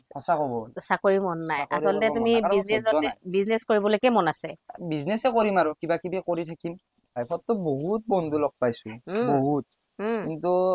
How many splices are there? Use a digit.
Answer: 1